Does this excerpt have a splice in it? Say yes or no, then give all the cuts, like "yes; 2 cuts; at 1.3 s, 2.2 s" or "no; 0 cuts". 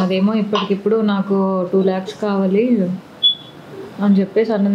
no; 0 cuts